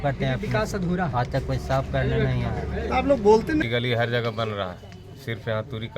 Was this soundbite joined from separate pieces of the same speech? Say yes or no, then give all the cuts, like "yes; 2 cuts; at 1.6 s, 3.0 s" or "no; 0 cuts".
yes; 1 cut; at 3.6 s